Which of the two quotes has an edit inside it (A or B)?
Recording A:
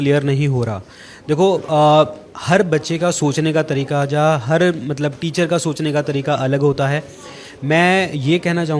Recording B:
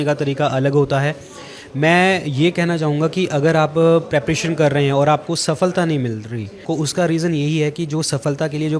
B